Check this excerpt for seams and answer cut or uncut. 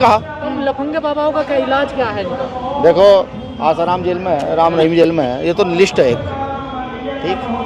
uncut